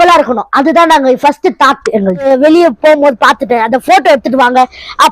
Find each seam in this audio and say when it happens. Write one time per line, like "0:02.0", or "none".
0:02.3